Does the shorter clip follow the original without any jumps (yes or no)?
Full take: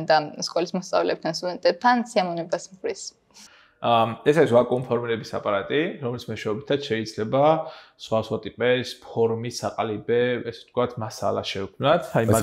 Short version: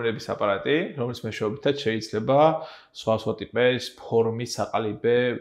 yes